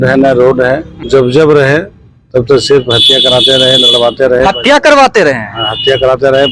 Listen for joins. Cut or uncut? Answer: uncut